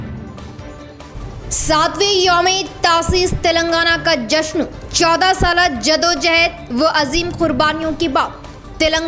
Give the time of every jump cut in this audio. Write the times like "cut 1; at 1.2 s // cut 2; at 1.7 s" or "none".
cut 1; at 1.0 s

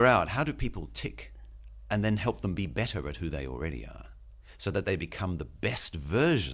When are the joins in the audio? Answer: none

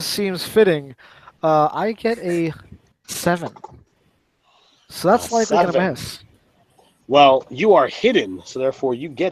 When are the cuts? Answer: none

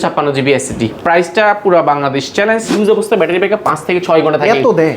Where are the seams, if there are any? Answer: cut 1; at 2.7 s

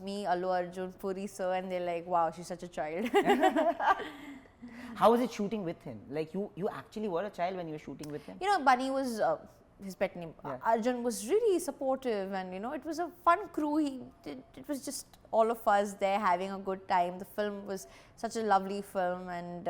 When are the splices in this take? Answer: none

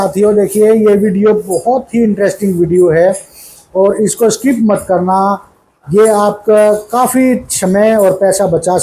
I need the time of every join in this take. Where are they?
none

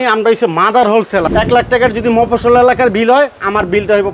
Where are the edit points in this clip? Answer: cut 1; at 1.3 s

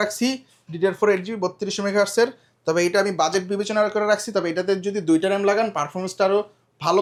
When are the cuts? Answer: none

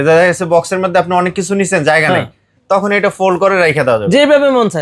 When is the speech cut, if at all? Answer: none

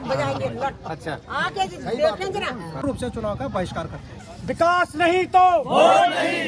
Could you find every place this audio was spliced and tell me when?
cut 1; at 2.8 s

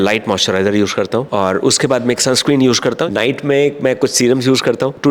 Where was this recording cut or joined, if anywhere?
cut 1; at 1.3 s // cut 2; at 3.1 s

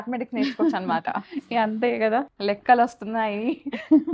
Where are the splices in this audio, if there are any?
cut 1; at 2.3 s

